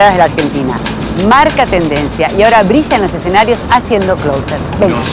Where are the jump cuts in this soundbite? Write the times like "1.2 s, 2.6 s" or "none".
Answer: none